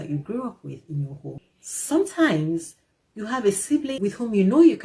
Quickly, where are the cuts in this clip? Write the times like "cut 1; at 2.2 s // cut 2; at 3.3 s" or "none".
cut 1; at 1.4 s // cut 2; at 3.9 s

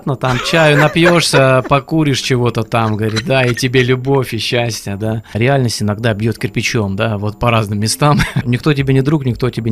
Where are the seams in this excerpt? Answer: cut 1; at 5.3 s // cut 2; at 8.4 s

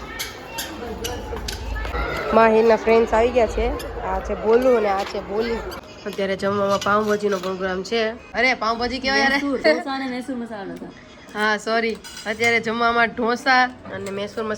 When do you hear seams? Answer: cut 1; at 1.9 s // cut 2; at 5.8 s // cut 3; at 8.2 s // cut 4; at 9.6 s

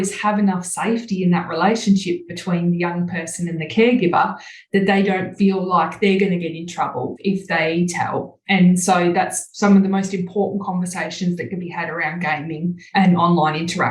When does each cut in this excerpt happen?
cut 1; at 8.3 s // cut 2; at 12.8 s

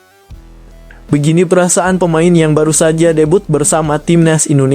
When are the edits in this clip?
cut 1; at 1.1 s

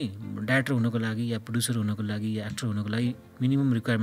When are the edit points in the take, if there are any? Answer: none

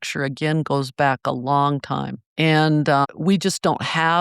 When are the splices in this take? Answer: cut 1; at 2.2 s // cut 2; at 3.1 s

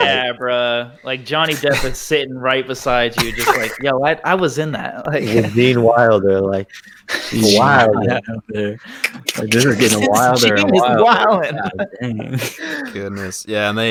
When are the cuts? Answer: none

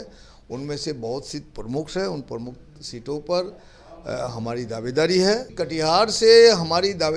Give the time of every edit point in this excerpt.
cut 1; at 5.5 s

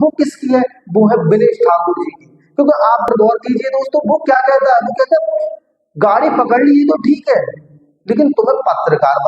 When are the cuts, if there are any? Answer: cut 1; at 3.1 s

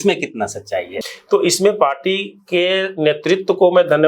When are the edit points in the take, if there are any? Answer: cut 1; at 0.9 s

